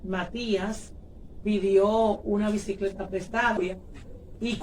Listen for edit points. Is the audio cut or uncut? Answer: cut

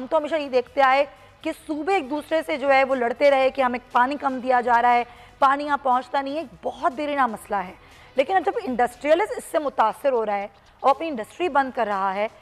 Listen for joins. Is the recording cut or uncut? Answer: uncut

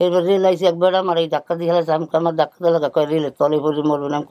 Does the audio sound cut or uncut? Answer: uncut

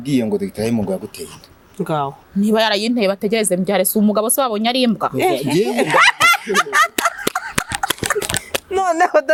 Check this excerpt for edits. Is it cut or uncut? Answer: uncut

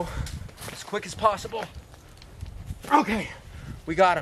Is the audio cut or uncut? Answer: uncut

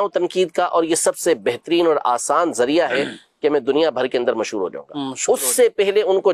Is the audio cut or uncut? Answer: uncut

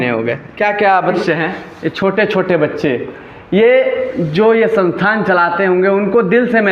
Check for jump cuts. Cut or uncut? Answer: cut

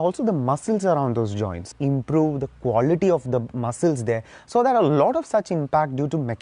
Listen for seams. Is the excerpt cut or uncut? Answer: cut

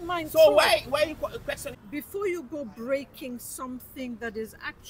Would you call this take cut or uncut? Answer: cut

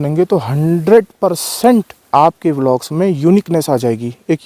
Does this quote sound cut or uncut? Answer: cut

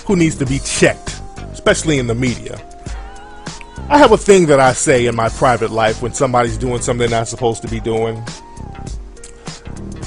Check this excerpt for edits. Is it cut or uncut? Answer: uncut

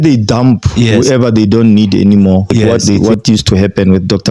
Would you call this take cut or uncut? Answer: cut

